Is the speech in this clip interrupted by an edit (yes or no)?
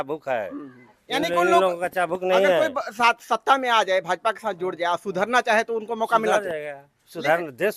no